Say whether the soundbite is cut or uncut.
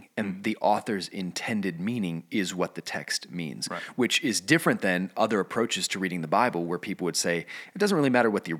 uncut